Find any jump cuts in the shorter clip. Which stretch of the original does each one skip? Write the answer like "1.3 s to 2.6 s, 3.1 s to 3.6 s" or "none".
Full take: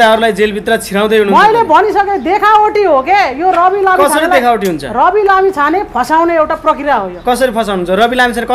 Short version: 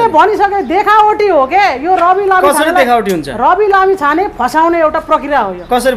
none